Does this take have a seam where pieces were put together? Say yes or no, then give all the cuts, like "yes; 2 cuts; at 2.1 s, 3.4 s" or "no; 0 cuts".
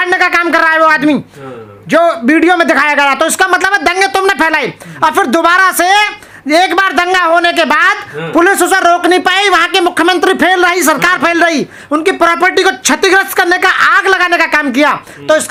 no; 0 cuts